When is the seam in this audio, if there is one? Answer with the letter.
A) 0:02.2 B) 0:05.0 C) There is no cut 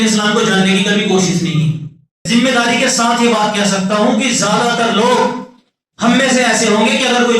A